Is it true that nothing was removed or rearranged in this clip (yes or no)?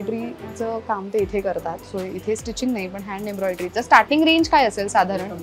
yes